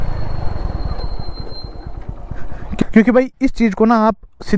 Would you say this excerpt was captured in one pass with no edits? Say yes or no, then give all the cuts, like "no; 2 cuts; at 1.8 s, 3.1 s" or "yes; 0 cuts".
no; 1 cut; at 2.8 s